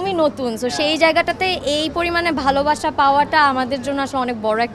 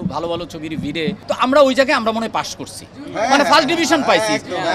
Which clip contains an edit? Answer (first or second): second